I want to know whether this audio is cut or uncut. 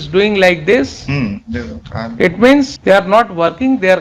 cut